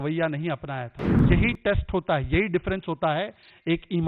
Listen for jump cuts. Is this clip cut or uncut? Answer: cut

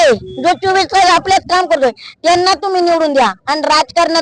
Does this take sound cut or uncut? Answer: uncut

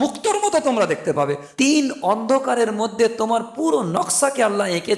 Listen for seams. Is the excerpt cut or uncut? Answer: cut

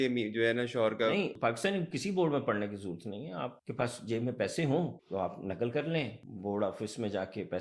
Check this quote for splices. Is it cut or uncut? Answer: cut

